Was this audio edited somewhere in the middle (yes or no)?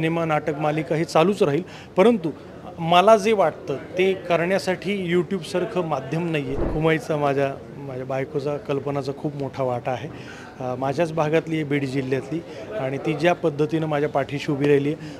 yes